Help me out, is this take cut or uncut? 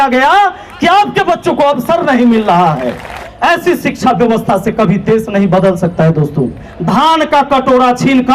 cut